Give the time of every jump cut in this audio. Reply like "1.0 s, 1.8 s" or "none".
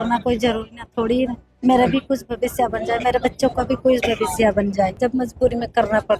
5.0 s